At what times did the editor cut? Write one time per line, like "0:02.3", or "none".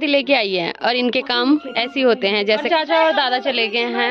0:02.7